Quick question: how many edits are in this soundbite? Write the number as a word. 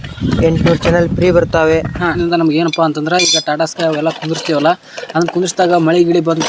one